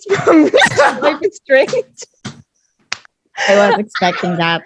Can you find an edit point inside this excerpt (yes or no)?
no